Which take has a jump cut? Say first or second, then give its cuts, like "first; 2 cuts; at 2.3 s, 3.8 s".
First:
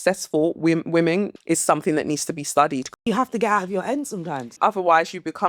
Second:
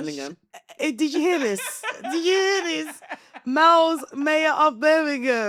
first; 3 cuts; at 1.4 s, 3.0 s, 4.5 s